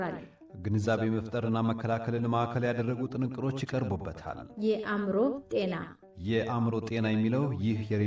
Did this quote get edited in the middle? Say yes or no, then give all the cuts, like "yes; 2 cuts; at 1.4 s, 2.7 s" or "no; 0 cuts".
yes; 1 cut; at 4.5 s